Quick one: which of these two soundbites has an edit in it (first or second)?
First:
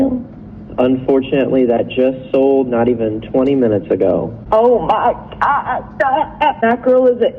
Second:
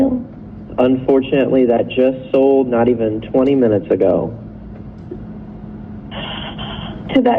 first